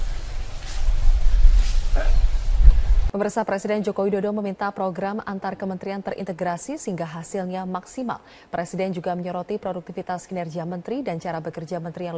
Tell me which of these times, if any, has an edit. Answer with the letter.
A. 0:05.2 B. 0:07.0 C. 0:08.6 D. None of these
A